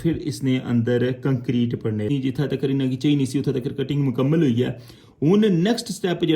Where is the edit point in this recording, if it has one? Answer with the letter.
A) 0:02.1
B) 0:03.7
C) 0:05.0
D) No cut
A